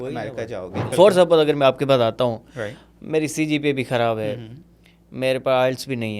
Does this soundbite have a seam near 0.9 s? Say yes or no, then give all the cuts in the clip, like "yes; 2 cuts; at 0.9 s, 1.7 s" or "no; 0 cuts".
yes; 1 cut; at 0.9 s